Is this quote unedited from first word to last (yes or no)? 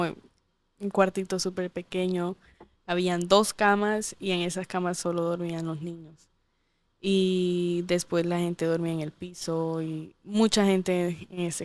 yes